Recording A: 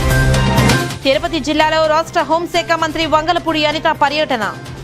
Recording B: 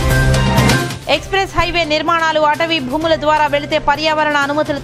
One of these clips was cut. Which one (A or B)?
A